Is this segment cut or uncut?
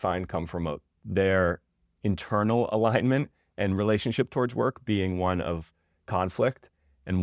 uncut